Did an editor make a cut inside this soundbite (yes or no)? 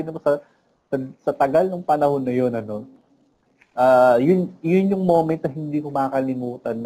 no